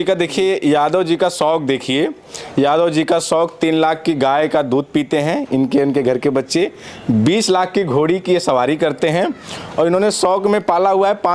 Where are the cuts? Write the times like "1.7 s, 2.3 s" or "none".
none